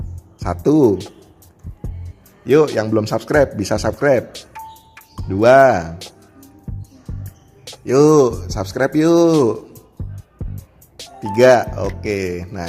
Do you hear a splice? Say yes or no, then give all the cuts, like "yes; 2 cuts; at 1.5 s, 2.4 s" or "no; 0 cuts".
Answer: yes; 2 cuts; at 9.8 s, 11.4 s